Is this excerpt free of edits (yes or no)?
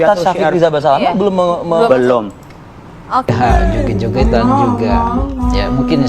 no